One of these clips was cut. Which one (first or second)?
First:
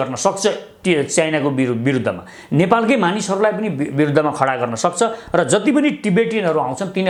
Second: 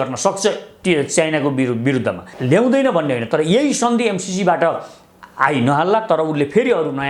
second